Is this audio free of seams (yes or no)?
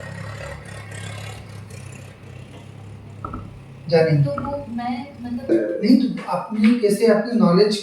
no